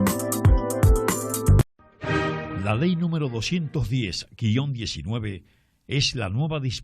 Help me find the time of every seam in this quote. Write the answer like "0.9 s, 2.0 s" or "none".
1.6 s